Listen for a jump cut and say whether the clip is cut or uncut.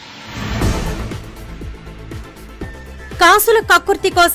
cut